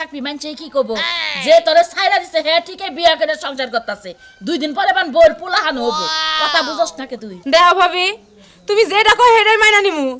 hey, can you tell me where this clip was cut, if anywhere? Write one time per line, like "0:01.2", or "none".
none